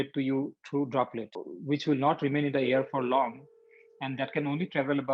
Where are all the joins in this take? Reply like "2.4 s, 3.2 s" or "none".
1.5 s